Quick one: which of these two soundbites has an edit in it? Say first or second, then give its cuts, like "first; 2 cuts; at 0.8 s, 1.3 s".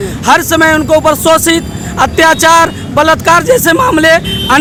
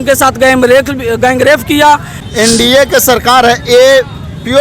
second; 1 cut; at 2.2 s